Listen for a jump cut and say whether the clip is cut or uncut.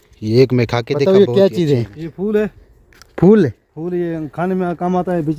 cut